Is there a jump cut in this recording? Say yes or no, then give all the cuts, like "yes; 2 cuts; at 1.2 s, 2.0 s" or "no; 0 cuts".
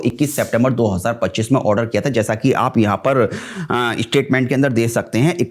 no; 0 cuts